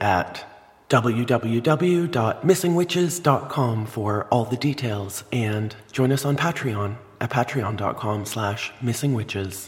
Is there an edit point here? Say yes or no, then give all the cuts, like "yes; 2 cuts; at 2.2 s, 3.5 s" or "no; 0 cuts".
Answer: no; 0 cuts